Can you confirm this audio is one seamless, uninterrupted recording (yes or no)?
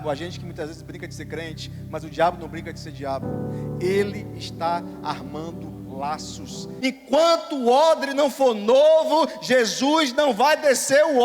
no